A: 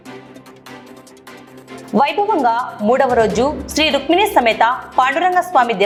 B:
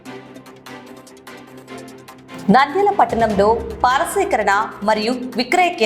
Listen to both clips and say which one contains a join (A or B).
B